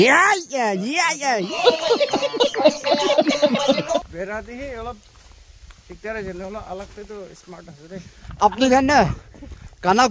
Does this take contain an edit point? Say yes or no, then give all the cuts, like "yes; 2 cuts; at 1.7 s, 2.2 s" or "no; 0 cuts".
yes; 3 cuts; at 0.9 s, 3.8 s, 8.3 s